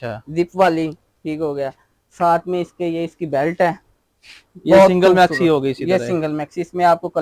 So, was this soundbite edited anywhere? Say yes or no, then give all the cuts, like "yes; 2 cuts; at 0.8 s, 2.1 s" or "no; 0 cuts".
no; 0 cuts